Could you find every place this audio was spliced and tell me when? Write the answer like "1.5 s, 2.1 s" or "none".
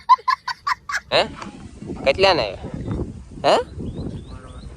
0.9 s